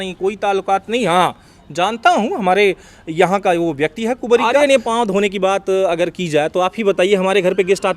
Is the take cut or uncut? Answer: cut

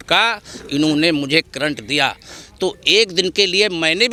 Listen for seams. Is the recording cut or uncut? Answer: uncut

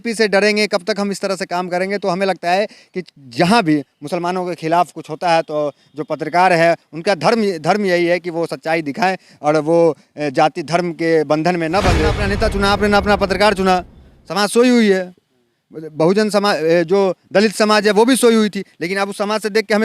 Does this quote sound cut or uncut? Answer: cut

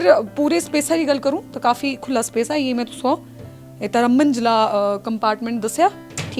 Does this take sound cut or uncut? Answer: uncut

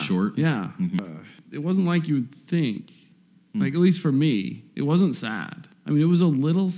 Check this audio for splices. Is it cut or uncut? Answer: cut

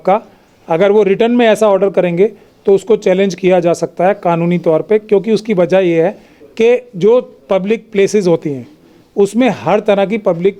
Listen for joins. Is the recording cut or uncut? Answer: uncut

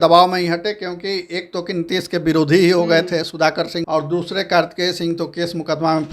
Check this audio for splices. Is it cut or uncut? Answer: cut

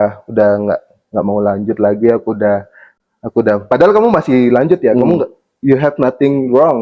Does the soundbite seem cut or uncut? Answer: uncut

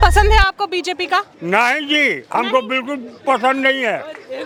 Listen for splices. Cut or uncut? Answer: uncut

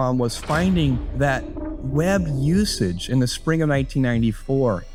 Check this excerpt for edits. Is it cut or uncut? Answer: uncut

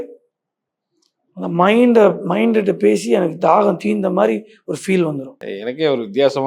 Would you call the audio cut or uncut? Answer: cut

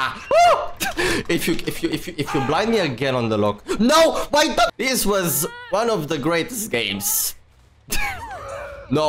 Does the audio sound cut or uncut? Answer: cut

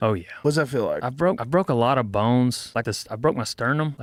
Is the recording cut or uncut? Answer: uncut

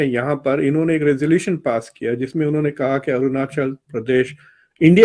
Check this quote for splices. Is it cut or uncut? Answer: uncut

